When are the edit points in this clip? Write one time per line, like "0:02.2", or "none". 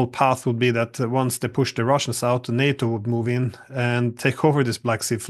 none